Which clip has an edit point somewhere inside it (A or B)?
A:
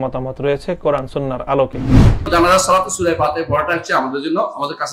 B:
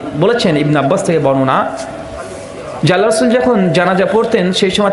A